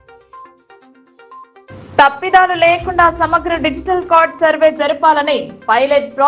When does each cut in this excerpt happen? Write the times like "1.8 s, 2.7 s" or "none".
none